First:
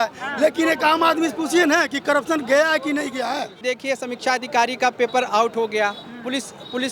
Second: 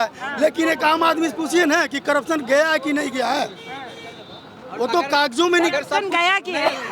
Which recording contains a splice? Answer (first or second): first